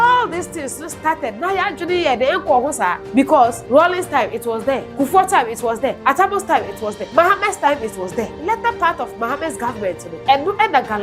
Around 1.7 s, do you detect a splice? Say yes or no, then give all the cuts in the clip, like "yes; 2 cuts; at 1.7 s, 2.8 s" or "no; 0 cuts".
no; 6 cuts; at 3.4 s, 4.9 s, 6.0 s, 7.0 s, 8.4 s, 10.1 s